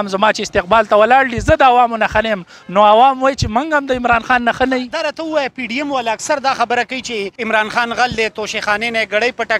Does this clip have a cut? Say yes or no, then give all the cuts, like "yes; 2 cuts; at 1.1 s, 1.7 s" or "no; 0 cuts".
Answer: yes; 2 cuts; at 4.9 s, 7.3 s